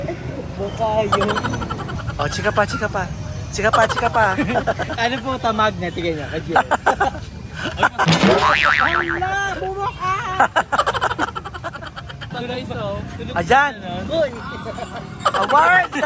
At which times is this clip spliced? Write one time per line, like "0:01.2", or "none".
0:01.9
0:12.3